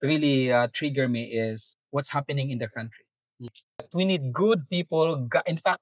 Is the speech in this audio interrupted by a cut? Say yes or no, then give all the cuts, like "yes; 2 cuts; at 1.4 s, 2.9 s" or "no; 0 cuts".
yes; 1 cut; at 3.8 s